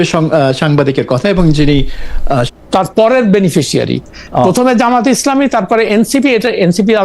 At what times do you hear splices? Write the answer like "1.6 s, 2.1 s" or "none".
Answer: 2.5 s